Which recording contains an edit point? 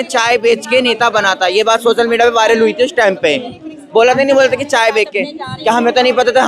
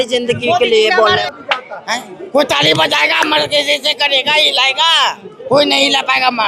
second; 1 cut; at 1.2 s

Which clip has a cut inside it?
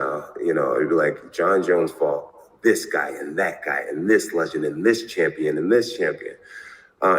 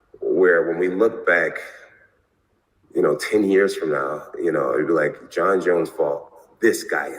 first; 1 cut; at 6.1 s

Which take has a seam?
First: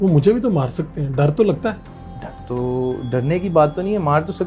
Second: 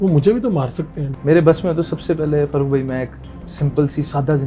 second; 1 cut; at 1.0 s

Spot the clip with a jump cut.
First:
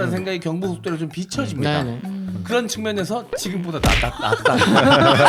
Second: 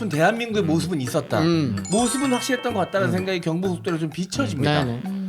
second; 1 cut; at 1.8 s

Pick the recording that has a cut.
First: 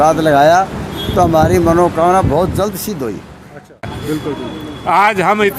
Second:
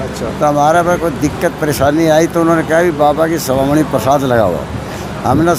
first; 1 cut; at 3.9 s

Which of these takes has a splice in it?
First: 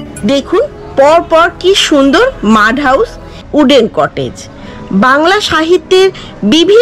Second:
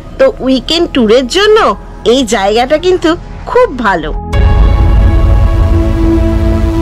first; 1 cut; at 3.4 s

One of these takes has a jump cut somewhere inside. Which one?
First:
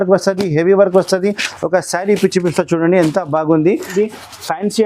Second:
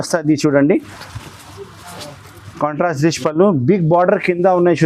first; 1 cut; at 3.9 s

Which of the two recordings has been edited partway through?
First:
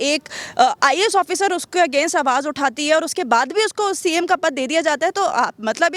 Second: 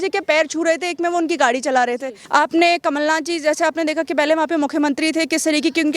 second; 1 cut; at 2.1 s

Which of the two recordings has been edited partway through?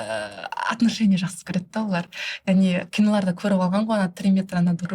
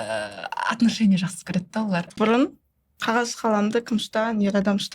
second; 1 cut; at 2.1 s

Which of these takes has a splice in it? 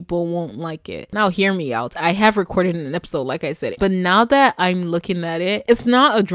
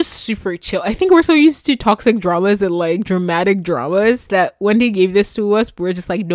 first; 3 cuts; at 1.0 s, 3.7 s, 5.7 s

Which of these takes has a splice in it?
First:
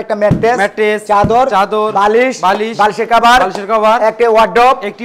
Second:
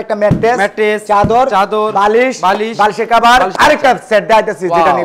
second; 1 cut; at 3.5 s

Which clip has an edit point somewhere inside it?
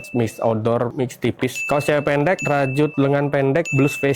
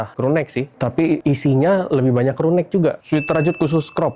second; 1 cut; at 3.0 s

